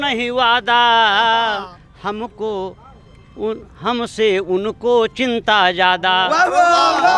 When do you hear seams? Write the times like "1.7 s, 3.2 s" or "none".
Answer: none